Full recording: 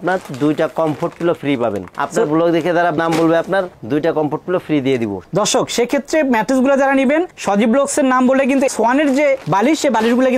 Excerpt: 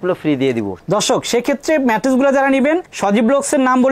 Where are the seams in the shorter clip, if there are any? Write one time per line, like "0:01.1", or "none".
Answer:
none